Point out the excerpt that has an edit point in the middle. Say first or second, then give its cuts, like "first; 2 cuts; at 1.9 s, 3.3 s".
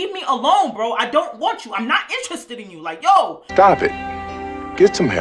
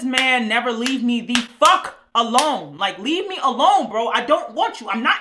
first; 1 cut; at 3.4 s